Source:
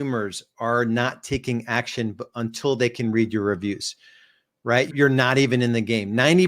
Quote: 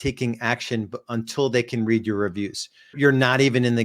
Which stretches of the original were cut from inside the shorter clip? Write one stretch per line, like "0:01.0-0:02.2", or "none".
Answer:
0:04.2-0:04.9